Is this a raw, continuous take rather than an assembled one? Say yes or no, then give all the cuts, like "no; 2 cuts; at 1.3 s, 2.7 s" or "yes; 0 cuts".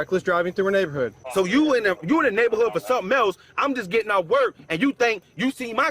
no; 1 cut; at 1.2 s